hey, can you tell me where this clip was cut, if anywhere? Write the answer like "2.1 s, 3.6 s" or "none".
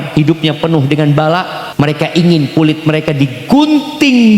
1.6 s